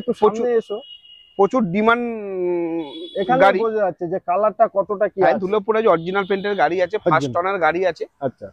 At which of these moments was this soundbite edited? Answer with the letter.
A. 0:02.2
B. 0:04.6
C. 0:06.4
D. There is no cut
D